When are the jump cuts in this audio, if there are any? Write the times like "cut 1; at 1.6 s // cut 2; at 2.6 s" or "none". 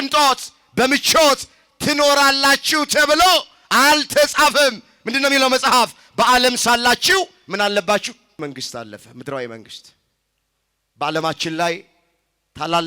cut 1; at 8.4 s